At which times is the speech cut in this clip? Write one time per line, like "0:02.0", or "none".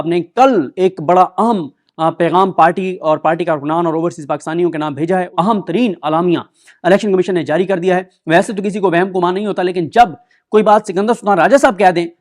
0:05.3
0:08.1